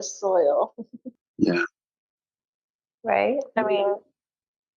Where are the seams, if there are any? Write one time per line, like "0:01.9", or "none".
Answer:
0:01.2